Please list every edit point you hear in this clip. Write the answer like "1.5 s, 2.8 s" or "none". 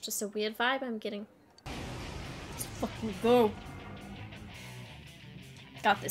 1.7 s